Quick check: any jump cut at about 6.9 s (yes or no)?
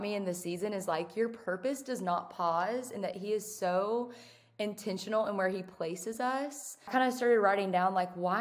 yes